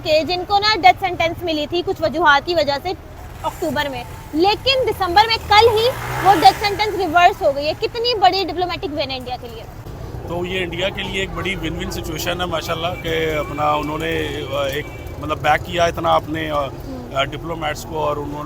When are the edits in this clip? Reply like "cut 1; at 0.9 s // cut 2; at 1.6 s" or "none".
cut 1; at 9.9 s